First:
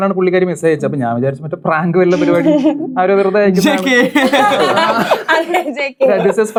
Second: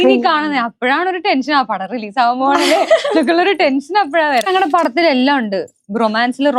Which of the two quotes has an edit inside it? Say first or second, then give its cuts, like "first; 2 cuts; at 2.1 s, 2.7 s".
second; 1 cut; at 4.5 s